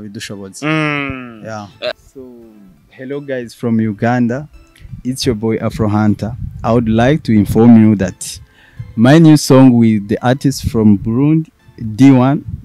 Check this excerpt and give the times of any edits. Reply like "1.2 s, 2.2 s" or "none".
1.9 s